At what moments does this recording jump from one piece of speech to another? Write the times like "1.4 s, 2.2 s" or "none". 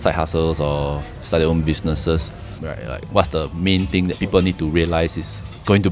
2.6 s